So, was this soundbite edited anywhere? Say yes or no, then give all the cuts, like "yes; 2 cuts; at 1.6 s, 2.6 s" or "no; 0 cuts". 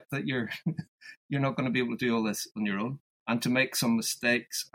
yes; 1 cut; at 3.1 s